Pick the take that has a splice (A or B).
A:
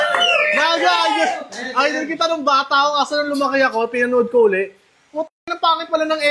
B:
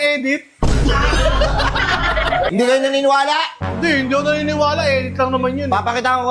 B